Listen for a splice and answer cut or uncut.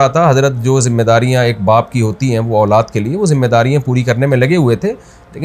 uncut